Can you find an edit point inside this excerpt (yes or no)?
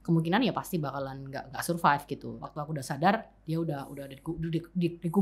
yes